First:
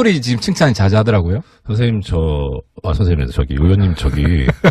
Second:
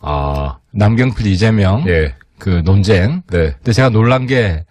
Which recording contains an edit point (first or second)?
second